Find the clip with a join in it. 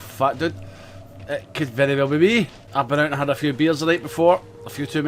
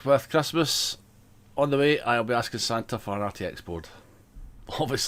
first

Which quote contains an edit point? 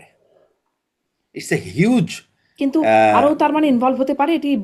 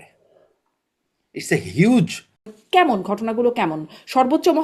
second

